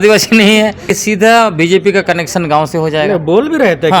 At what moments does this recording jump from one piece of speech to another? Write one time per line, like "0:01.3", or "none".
0:00.9